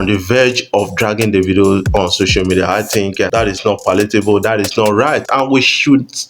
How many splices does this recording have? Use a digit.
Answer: 2